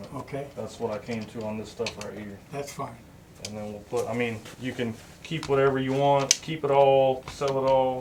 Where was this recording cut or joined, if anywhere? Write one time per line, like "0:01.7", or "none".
none

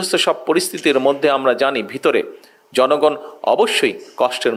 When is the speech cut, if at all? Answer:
none

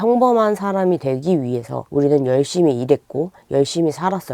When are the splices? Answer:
0:01.8

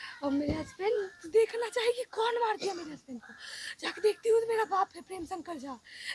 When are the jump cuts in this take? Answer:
0:01.0

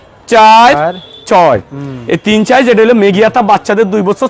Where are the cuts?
none

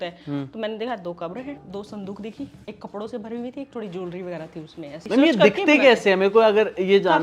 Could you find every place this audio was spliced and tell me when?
0:01.6
0:02.6
0:05.0

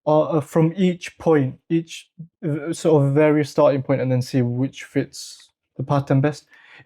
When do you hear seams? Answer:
none

